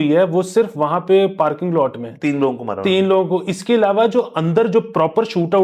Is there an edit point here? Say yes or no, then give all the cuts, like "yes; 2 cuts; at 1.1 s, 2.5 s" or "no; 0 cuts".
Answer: no; 0 cuts